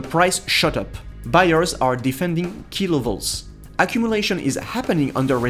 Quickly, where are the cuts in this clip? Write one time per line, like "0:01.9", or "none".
0:01.0